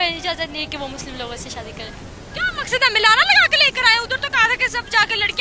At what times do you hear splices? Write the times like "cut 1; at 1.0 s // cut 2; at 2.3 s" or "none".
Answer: none